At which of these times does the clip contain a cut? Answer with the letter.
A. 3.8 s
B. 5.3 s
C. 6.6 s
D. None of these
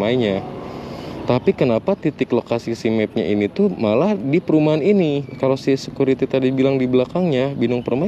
B